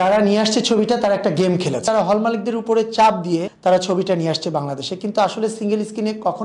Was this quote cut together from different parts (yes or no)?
yes